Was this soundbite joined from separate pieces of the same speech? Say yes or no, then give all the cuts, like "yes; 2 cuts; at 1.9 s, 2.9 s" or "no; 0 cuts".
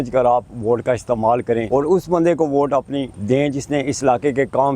yes; 2 cuts; at 1.6 s, 3.1 s